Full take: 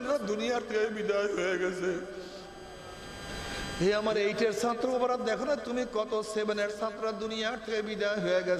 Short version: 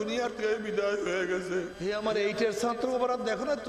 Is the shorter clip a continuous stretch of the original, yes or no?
no